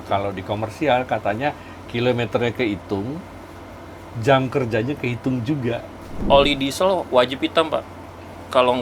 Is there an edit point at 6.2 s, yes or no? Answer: yes